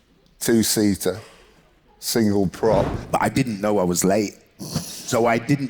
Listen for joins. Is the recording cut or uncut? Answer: cut